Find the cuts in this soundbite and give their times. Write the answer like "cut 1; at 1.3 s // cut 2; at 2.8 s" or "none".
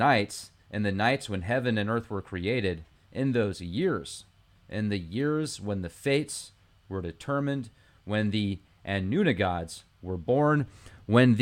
cut 1; at 9.4 s